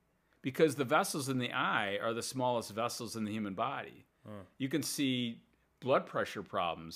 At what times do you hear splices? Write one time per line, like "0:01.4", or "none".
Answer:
none